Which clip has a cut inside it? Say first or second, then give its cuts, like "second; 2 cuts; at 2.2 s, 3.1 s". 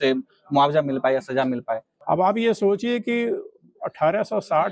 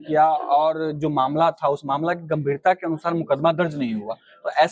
first; 1 cut; at 1.9 s